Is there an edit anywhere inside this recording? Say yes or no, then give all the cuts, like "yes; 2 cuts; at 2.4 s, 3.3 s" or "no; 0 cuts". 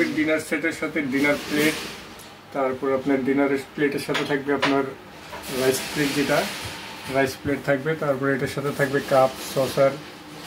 no; 0 cuts